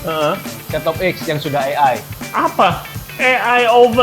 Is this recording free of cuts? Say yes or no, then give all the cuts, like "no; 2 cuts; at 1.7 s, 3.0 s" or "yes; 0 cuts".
no; 1 cut; at 2.2 s